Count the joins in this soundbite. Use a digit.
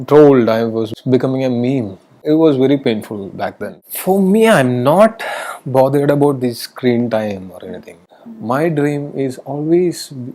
4